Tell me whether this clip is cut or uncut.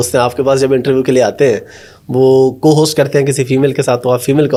uncut